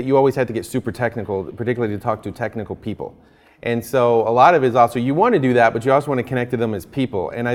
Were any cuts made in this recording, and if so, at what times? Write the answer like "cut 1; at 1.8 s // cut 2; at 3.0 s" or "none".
none